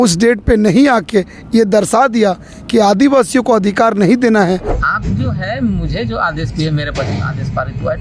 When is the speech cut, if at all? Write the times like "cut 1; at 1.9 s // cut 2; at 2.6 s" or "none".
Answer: cut 1; at 4.7 s

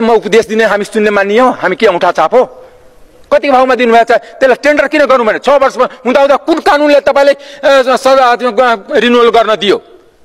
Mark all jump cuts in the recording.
none

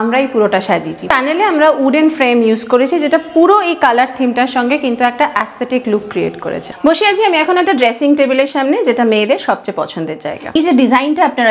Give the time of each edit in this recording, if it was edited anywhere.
cut 1; at 1.1 s // cut 2; at 6.6 s // cut 3; at 10.5 s

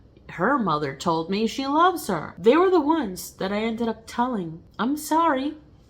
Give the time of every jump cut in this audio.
cut 1; at 2.3 s // cut 2; at 4.6 s

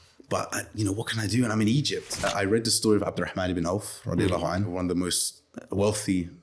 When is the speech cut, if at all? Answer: cut 1; at 2.2 s // cut 2; at 4.7 s

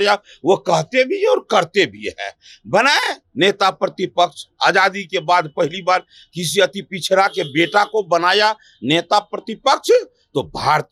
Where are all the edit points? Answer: none

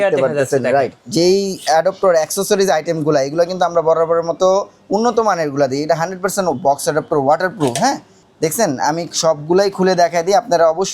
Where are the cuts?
cut 1; at 1.0 s

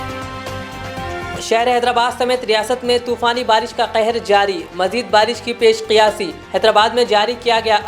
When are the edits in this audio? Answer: cut 1; at 1.3 s

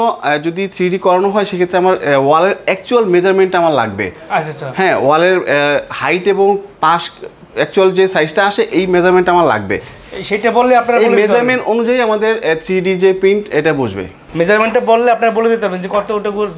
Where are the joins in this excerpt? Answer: none

